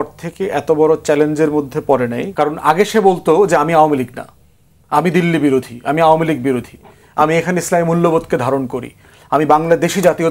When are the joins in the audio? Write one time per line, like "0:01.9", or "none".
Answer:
0:02.2